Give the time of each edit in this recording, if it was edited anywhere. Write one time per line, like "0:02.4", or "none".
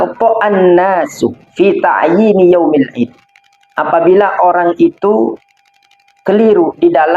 none